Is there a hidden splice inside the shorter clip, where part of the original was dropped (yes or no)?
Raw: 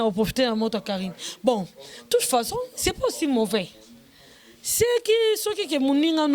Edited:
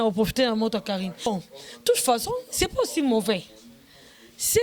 yes